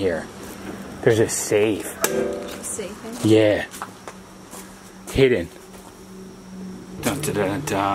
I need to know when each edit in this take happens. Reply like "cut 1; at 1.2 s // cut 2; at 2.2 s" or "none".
cut 1; at 7.0 s